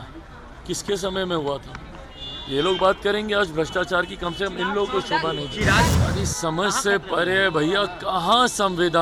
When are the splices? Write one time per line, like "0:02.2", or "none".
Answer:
0:05.9